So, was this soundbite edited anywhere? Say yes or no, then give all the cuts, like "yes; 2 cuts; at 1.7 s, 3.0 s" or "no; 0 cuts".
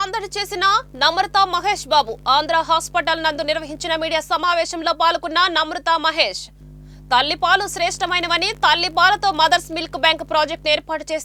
no; 0 cuts